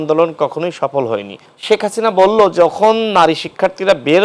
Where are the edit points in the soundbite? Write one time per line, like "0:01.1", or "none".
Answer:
0:01.5